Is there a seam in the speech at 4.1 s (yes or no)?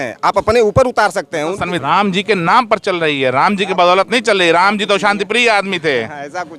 no